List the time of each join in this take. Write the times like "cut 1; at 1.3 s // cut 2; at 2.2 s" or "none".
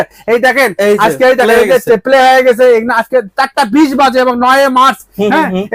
none